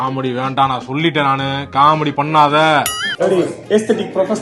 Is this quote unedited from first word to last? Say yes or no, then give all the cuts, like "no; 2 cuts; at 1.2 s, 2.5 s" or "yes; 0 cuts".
no; 1 cut; at 3.0 s